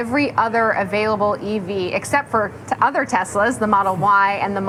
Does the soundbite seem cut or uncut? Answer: uncut